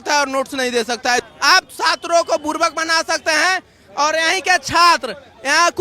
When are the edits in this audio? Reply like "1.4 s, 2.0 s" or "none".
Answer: 1.2 s